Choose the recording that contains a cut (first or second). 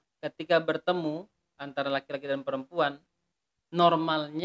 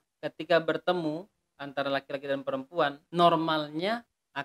second